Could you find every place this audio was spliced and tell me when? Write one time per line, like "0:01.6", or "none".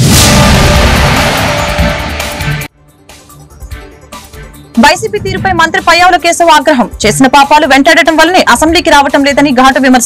none